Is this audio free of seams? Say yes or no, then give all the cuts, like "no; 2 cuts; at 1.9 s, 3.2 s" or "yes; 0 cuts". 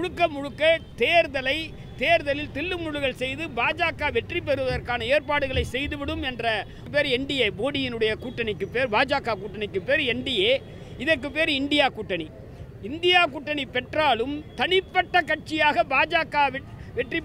no; 1 cut; at 6.8 s